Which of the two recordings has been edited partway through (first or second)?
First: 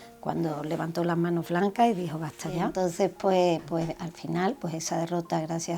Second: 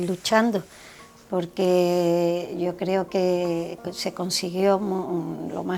first